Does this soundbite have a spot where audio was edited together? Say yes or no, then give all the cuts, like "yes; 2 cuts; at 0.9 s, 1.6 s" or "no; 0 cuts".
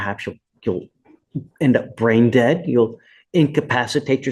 no; 0 cuts